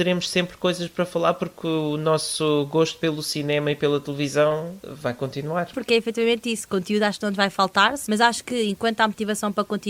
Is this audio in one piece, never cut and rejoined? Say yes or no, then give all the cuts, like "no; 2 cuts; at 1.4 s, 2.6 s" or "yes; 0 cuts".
no; 3 cuts; at 4.8 s, 5.7 s, 8.0 s